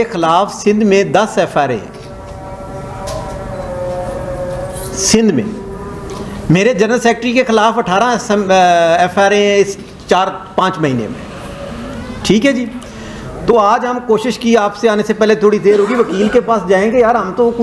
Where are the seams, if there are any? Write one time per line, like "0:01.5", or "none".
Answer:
none